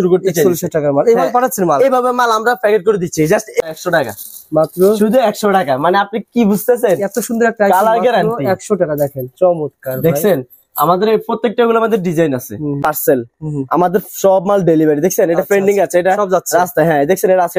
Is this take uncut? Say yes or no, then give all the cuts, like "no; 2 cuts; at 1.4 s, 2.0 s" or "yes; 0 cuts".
no; 2 cuts; at 3.6 s, 12.8 s